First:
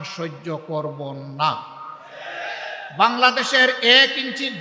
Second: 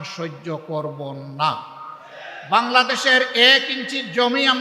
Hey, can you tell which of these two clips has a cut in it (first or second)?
second